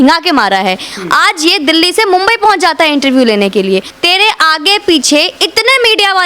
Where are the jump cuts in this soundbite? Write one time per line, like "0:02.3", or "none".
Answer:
0:03.9